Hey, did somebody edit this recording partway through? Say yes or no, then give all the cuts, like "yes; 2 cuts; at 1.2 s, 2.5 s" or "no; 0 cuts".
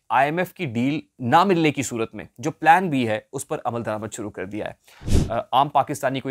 yes; 2 cuts; at 1.1 s, 5.0 s